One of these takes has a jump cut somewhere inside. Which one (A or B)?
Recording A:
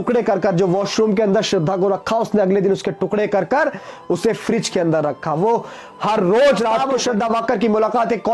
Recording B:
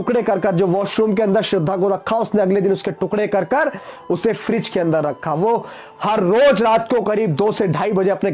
A